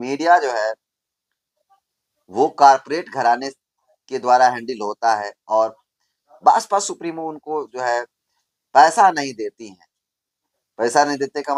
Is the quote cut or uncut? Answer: uncut